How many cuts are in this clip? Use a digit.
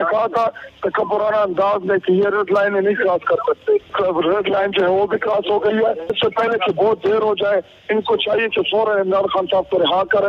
2